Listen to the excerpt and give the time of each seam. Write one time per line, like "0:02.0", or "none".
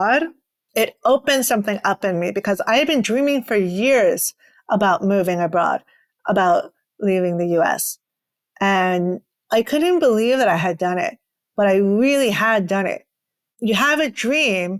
none